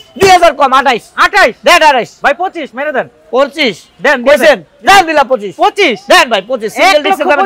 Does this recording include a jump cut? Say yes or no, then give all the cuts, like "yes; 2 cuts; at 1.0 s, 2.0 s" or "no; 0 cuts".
no; 0 cuts